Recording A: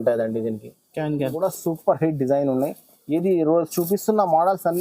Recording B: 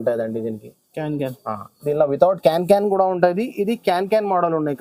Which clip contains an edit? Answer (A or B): A